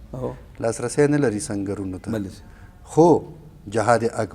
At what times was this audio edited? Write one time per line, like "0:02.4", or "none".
none